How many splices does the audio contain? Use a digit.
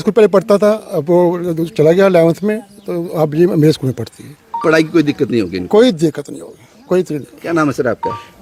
0